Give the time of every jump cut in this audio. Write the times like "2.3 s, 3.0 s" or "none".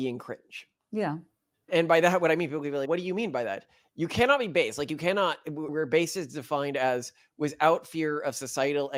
none